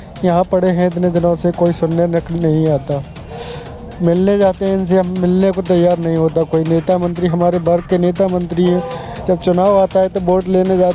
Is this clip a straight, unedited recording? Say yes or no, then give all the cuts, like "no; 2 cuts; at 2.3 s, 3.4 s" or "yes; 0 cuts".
yes; 0 cuts